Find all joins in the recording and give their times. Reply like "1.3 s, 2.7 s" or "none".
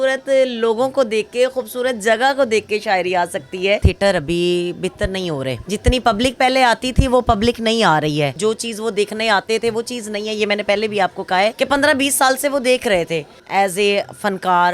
3.8 s, 5.6 s, 8.3 s, 11.5 s, 13.3 s